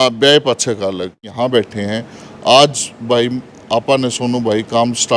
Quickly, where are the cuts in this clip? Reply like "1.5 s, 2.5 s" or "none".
1.3 s